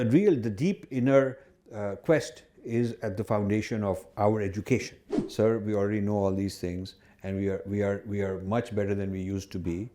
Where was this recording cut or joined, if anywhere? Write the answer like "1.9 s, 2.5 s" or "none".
5.2 s